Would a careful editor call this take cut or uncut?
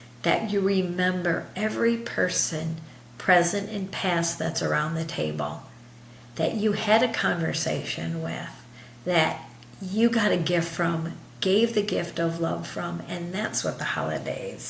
uncut